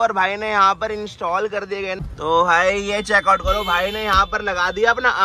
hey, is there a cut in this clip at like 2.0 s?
yes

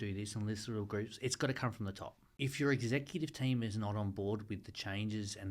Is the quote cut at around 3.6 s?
no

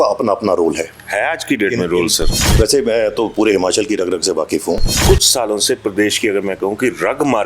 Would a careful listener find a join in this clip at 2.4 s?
yes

